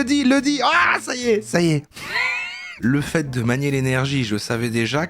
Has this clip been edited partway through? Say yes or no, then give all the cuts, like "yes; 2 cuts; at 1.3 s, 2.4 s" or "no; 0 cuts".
yes; 1 cut; at 2.7 s